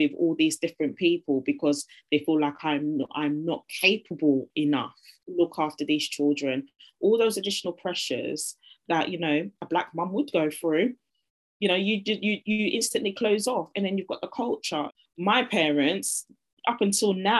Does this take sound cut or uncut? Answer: cut